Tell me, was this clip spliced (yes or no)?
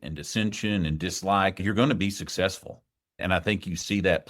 yes